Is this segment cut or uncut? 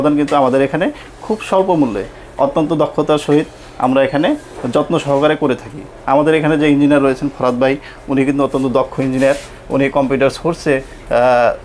uncut